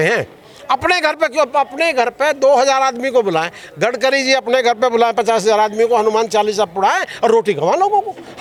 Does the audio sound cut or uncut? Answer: uncut